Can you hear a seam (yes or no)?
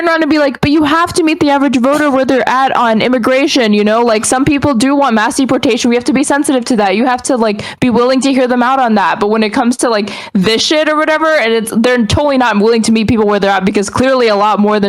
no